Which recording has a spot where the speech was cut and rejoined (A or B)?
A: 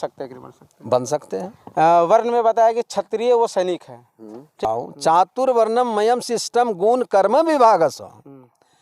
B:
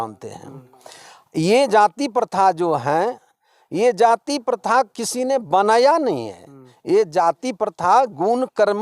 A